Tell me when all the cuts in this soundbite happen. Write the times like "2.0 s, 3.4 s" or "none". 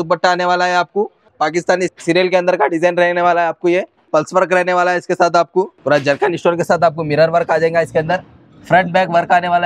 1.3 s, 4.1 s, 5.8 s